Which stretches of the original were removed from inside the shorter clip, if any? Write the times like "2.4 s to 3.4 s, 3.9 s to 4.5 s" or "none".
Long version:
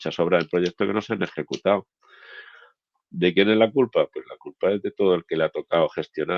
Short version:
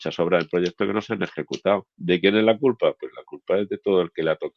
1.9 s to 3.1 s